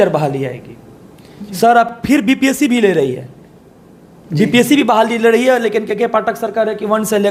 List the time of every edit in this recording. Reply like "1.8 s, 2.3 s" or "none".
none